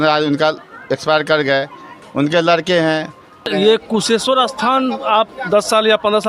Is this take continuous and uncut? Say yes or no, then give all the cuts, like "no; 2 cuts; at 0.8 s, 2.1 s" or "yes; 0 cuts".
no; 1 cut; at 3.5 s